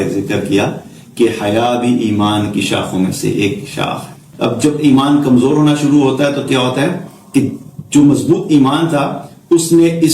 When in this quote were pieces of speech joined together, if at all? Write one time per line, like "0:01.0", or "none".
0:04.2